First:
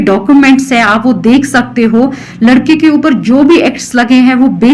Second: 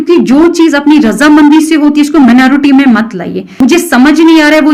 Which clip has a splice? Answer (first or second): second